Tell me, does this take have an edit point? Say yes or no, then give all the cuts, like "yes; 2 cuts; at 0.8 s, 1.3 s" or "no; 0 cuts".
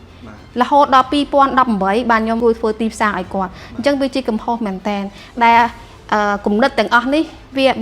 yes; 1 cut; at 2.4 s